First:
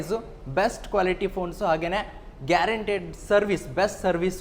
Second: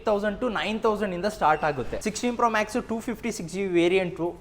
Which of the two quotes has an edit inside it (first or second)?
second